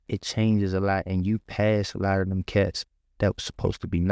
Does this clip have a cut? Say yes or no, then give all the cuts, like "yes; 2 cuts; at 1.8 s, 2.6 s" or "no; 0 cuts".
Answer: no; 0 cuts